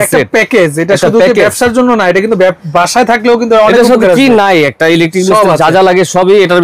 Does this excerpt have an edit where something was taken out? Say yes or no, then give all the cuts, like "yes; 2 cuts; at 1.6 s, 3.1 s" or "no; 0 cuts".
no; 0 cuts